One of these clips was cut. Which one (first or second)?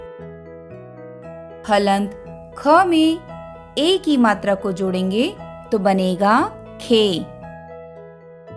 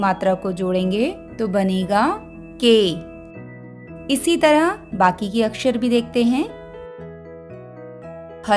first